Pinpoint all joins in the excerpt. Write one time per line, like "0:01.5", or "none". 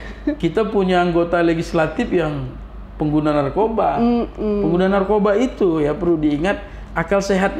none